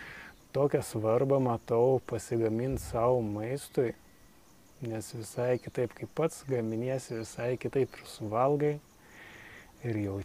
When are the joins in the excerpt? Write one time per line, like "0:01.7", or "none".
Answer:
none